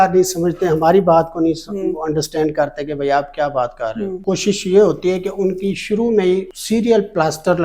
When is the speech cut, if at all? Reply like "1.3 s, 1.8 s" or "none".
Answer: 4.2 s, 6.5 s